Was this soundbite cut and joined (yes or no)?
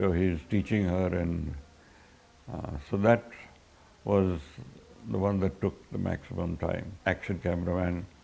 yes